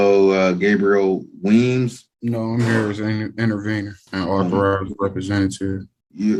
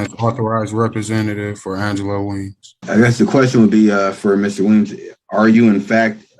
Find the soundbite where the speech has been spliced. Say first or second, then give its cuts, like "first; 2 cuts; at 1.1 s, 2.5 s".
second; 1 cut; at 2.8 s